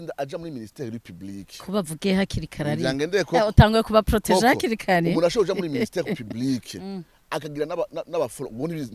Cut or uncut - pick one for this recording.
uncut